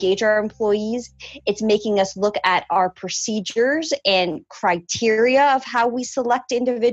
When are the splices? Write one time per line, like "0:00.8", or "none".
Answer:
none